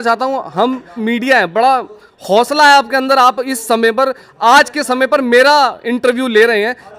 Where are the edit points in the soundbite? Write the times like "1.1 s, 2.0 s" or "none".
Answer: 1.0 s